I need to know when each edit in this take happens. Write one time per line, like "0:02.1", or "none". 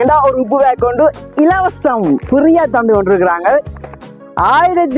0:03.8